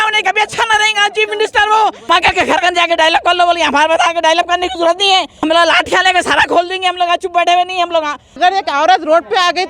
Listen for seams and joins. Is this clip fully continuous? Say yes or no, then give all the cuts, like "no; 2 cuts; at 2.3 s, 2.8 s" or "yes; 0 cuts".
no; 3 cuts; at 2.1 s, 5.4 s, 8.4 s